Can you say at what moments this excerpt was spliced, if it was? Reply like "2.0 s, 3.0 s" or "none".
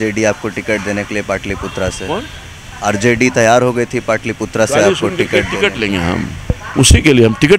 6.6 s